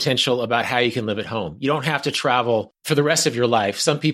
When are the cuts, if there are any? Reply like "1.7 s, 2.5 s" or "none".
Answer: 2.7 s